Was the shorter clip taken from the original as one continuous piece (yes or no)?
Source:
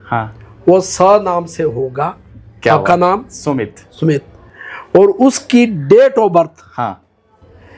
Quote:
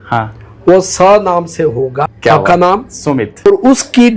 no